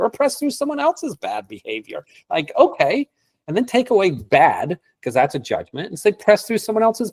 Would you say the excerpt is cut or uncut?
uncut